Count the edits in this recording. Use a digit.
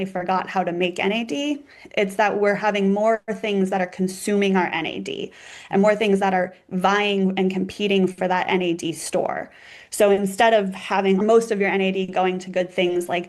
1